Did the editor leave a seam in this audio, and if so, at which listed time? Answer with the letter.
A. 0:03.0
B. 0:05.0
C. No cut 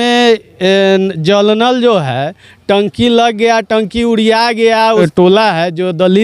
B